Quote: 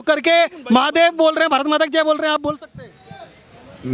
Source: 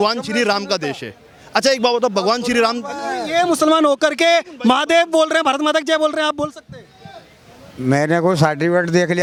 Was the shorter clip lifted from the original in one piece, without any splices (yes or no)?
yes